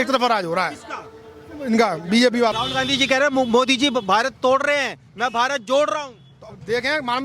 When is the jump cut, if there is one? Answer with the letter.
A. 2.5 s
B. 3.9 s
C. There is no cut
A